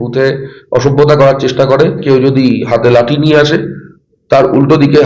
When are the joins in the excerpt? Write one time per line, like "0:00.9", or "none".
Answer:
0:02.0